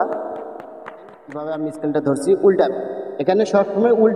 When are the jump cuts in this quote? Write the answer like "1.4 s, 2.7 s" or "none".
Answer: 1.5 s